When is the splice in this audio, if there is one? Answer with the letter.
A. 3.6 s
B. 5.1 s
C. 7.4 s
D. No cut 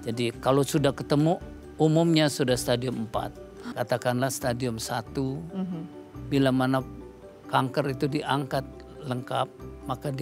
A